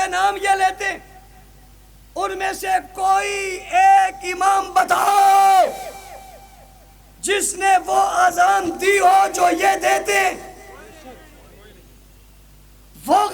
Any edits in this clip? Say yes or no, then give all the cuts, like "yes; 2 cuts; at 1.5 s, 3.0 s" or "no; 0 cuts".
no; 0 cuts